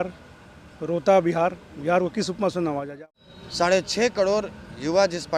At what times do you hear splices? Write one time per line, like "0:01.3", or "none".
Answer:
0:02.9